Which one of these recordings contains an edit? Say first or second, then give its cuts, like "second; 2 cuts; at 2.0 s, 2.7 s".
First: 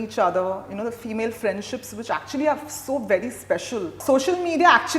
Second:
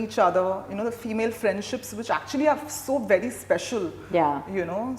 first; 1 cut; at 4.0 s